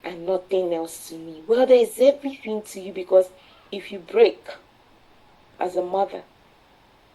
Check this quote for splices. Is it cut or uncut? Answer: cut